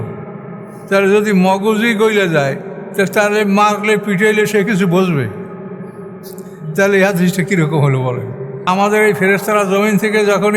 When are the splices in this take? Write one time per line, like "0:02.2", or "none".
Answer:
0:08.6

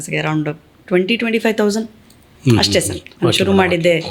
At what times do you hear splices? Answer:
none

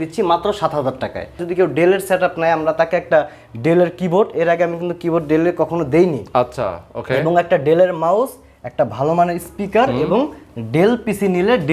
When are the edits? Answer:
0:01.4

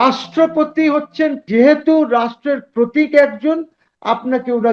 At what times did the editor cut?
0:01.4

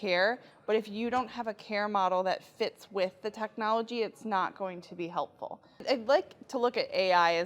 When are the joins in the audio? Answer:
0:05.8

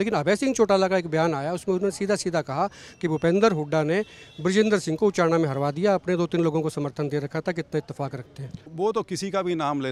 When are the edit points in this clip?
0:08.6

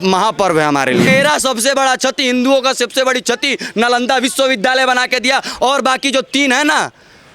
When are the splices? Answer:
0:01.1

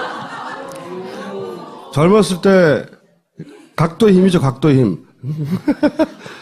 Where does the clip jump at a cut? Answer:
0:03.3

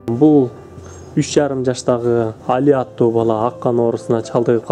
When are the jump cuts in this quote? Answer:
0:02.4

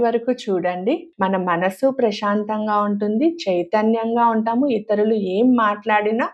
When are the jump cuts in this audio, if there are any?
0:01.1

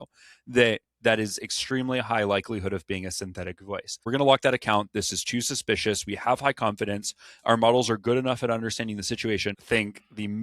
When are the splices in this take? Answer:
0:04.0
0:09.5

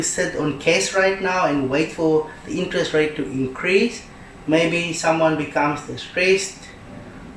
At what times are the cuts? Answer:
none

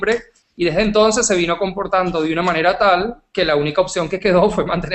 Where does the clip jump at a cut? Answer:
none

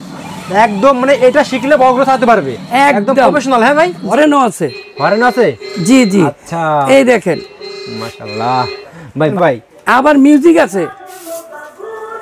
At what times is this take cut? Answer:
0:04.0
0:09.3

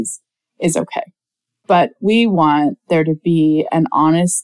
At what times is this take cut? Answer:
0:01.6

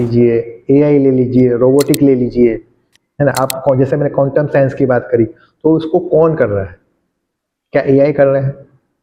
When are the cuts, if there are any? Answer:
none

